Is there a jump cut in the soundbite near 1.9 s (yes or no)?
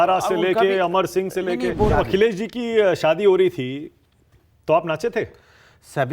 yes